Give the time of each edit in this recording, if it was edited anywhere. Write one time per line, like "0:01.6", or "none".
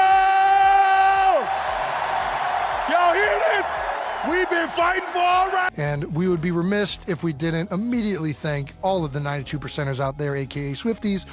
none